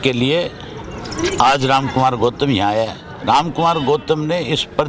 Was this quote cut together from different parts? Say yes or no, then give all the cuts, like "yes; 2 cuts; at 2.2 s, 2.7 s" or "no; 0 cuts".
no; 0 cuts